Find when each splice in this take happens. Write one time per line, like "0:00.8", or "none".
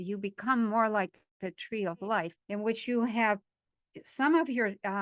0:02.4